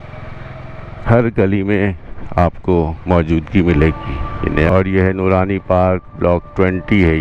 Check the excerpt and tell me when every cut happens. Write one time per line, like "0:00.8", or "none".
0:04.7